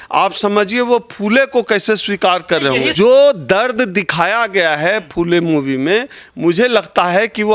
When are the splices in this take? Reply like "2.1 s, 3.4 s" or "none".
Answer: 2.9 s